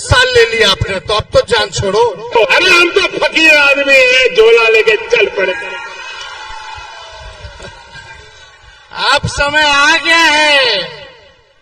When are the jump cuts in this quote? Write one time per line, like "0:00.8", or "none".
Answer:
0:02.4

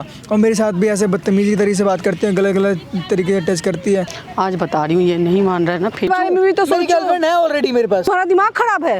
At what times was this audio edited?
0:04.2
0:06.1
0:08.1

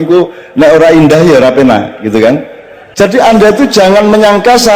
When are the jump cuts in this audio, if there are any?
0:02.8

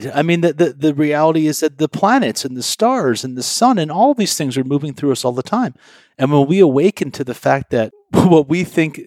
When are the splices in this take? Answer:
0:08.0

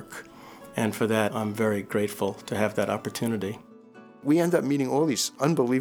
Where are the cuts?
0:01.3
0:04.2

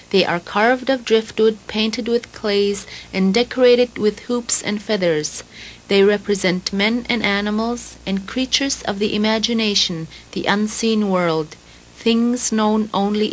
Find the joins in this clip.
0:07.9

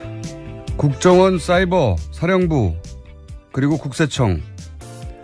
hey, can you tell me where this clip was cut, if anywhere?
0:02.6

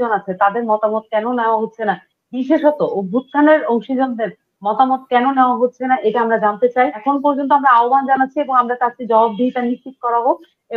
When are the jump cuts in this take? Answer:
0:07.0

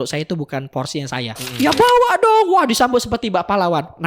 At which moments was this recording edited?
0:01.4

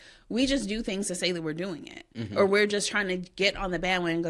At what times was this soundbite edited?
none

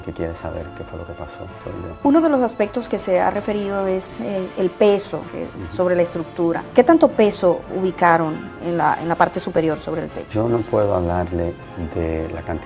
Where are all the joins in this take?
0:01.9
0:06.6

